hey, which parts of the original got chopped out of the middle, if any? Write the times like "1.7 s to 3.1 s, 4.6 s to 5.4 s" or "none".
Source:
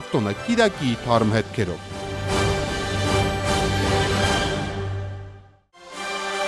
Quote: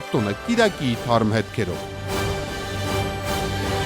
1.8 s to 2.0 s